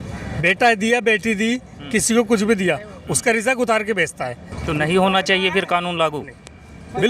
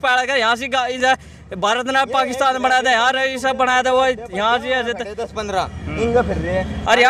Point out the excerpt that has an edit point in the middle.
first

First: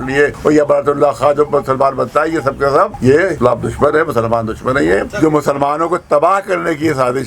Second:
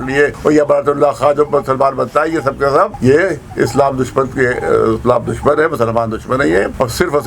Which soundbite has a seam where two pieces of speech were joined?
first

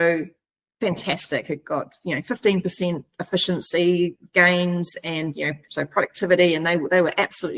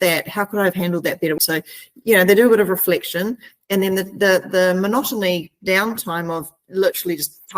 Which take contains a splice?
second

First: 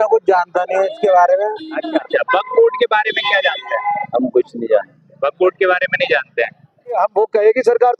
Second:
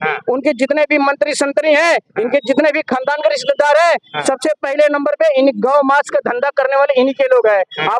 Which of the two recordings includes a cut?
first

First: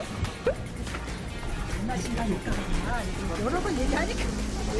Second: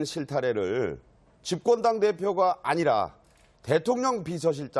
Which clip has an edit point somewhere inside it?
first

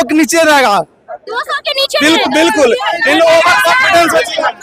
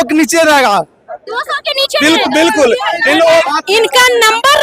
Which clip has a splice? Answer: second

